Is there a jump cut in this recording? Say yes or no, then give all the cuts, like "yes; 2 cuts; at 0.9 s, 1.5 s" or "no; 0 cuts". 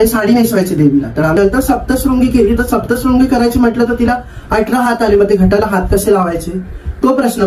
yes; 1 cut; at 1.4 s